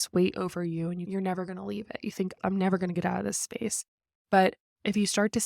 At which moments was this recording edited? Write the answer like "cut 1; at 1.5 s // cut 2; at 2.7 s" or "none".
cut 1; at 1.1 s // cut 2; at 2.4 s